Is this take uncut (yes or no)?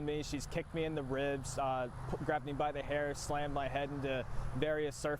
yes